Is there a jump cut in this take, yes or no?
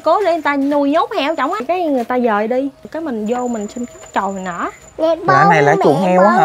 yes